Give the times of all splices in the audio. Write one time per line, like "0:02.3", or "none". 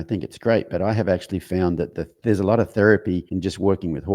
0:02.1
0:03.3

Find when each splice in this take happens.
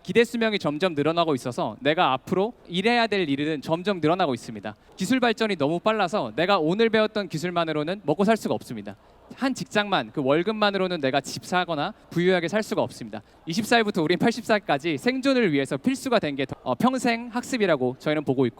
0:02.7
0:04.9
0:09.2
0:13.3
0:16.5

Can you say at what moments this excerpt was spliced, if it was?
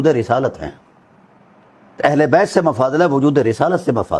none

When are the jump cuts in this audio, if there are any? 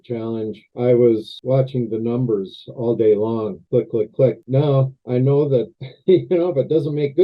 0:04.4

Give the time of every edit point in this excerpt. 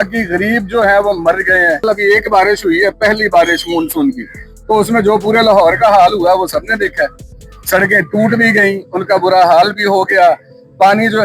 0:01.8

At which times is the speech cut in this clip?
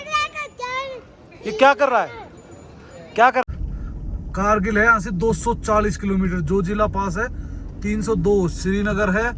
0:04.0

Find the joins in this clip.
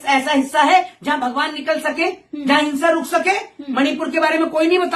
none

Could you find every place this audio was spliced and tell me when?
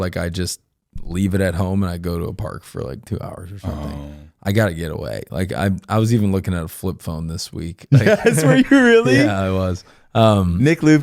none

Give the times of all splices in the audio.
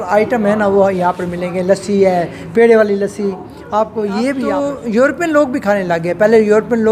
0:04.6

